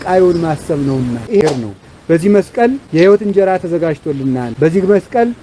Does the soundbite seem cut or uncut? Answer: cut